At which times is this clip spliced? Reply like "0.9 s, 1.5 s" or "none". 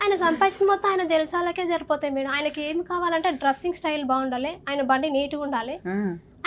none